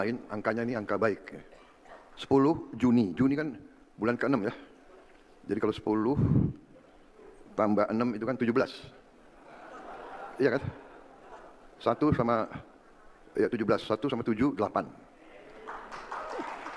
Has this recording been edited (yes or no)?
no